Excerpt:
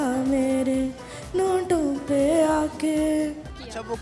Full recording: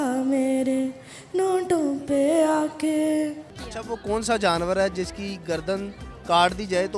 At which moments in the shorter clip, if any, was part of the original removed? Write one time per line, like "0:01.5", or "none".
none

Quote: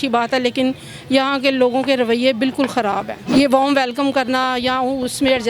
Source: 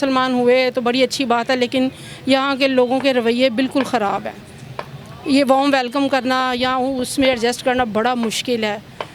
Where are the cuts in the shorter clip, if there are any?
0:03.1

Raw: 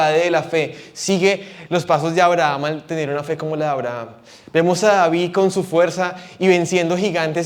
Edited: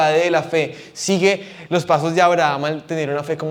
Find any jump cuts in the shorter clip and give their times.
none

